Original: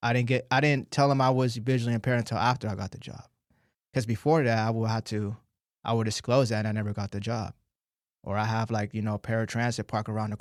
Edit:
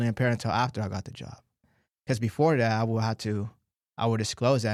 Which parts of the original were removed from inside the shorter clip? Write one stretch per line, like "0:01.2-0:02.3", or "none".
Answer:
none